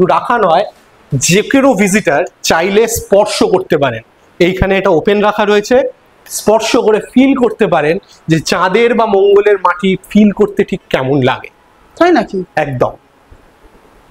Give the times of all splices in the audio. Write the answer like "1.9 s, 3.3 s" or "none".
none

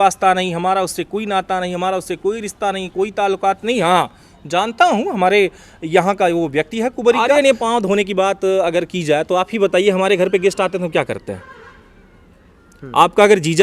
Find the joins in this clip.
7.2 s

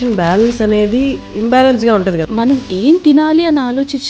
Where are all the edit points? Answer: 1.3 s, 2.2 s

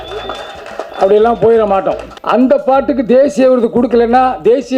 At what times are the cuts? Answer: 2.1 s

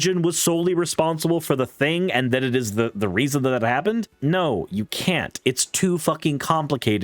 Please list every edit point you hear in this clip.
4.1 s

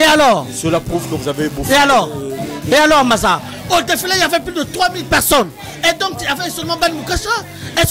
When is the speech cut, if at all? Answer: none

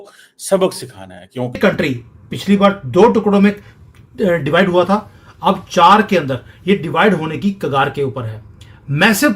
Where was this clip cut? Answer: 1.6 s

